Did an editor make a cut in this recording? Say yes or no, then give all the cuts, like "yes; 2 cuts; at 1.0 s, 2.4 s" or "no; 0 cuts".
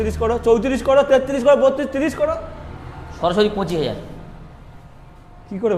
no; 0 cuts